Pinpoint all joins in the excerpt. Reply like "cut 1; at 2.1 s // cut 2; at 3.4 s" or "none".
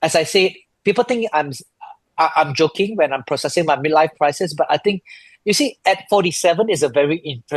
none